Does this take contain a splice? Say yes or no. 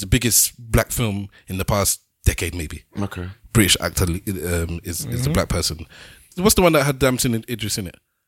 yes